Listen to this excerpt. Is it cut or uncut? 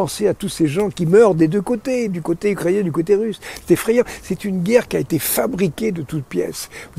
uncut